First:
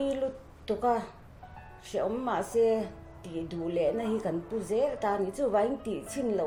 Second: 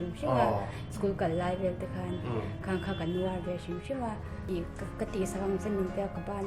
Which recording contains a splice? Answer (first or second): second